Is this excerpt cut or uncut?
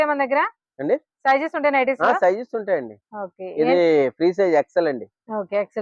uncut